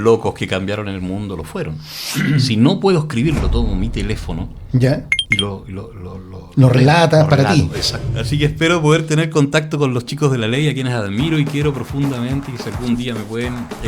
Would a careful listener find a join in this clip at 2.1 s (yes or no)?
yes